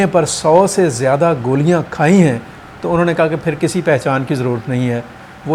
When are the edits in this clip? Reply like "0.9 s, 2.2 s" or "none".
none